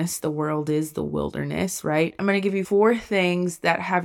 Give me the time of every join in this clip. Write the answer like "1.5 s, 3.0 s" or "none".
2.3 s